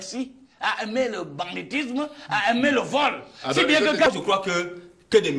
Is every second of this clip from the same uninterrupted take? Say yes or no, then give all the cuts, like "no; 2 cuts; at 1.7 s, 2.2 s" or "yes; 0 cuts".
no; 1 cut; at 4.1 s